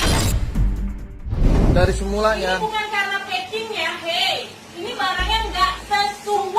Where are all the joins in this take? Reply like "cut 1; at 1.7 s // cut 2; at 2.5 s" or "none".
cut 1; at 1.8 s